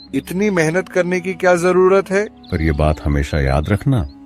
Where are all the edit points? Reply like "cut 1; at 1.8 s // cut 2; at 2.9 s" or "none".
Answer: cut 1; at 2.4 s